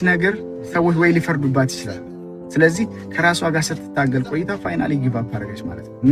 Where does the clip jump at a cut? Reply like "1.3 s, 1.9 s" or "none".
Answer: none